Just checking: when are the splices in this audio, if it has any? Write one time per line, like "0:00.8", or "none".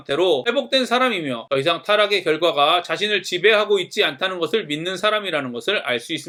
none